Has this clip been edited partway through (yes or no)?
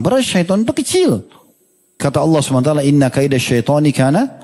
yes